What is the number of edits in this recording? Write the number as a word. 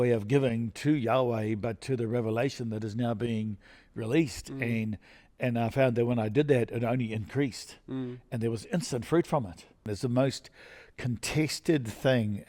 one